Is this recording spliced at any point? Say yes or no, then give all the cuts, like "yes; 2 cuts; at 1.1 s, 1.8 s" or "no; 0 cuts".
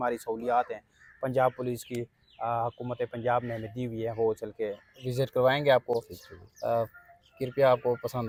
no; 0 cuts